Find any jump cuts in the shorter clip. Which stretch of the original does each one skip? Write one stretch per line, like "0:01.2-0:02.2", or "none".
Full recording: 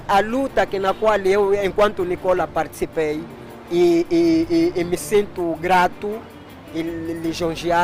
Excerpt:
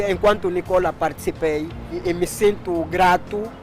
0:03.6-0:04.8